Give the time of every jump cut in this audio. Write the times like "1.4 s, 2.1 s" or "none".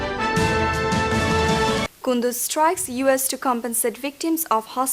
1.4 s